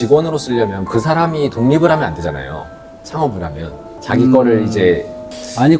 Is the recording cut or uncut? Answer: cut